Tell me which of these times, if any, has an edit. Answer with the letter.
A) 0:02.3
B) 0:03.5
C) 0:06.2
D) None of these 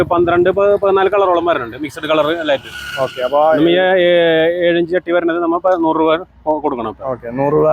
D